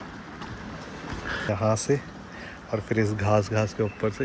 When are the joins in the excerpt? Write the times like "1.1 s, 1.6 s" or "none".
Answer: 1.5 s